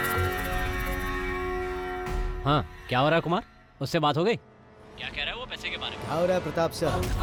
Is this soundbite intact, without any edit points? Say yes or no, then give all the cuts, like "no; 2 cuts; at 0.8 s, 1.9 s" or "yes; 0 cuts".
yes; 0 cuts